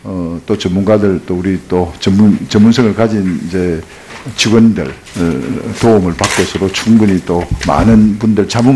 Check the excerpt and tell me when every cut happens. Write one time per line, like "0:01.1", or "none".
0:04.8